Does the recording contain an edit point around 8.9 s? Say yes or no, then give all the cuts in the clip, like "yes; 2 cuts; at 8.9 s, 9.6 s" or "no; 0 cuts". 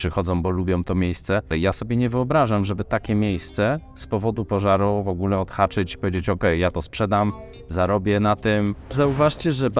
yes; 2 cuts; at 1.5 s, 8.9 s